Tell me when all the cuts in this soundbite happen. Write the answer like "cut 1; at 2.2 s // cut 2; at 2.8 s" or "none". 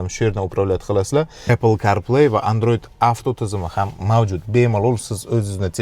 cut 1; at 1.5 s

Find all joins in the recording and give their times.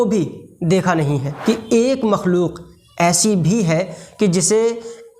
cut 1; at 1.3 s

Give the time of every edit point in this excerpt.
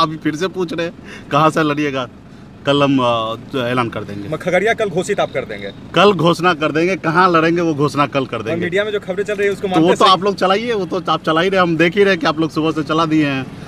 none

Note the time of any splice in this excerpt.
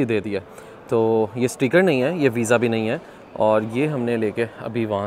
none

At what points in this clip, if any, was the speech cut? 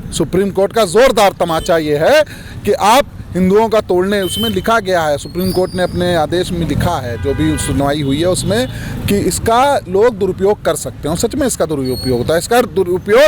none

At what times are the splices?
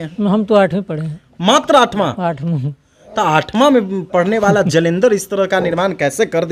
none

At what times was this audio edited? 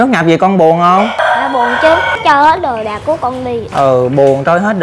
cut 1; at 1.2 s // cut 2; at 2.2 s // cut 3; at 3.7 s

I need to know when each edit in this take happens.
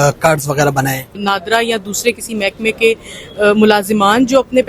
cut 1; at 1.2 s

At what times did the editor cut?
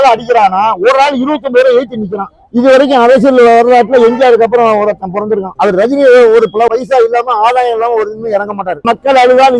cut 1; at 5.5 s // cut 2; at 6.7 s // cut 3; at 8.8 s

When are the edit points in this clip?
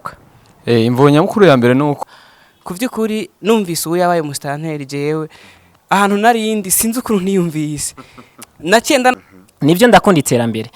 cut 1; at 2.0 s // cut 2; at 9.2 s

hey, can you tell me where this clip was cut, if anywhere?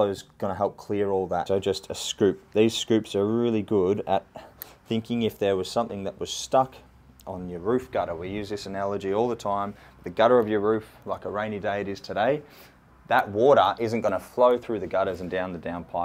cut 1; at 1.4 s

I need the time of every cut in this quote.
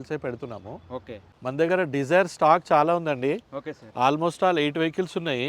cut 1; at 1.3 s

